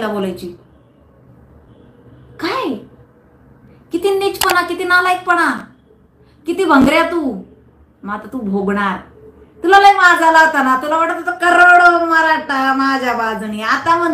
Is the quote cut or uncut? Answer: uncut